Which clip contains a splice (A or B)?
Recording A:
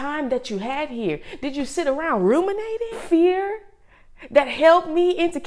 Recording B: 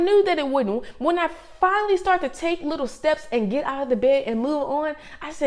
A